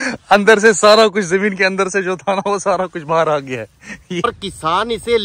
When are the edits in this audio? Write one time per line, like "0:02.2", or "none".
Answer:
0:04.3